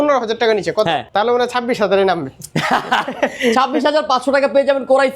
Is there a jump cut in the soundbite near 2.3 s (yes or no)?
no